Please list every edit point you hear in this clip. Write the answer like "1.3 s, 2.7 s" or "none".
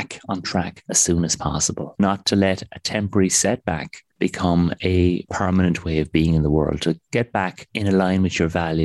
2.0 s, 5.3 s